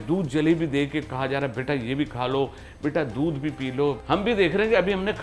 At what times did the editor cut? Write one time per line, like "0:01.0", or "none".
0:04.0